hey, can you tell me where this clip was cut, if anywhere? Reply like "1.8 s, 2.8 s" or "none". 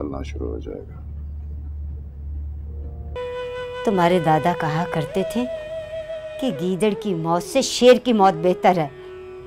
3.2 s